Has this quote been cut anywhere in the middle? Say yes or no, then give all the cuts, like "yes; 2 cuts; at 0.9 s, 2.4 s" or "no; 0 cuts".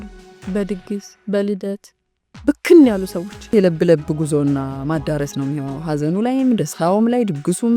yes; 1 cut; at 3.5 s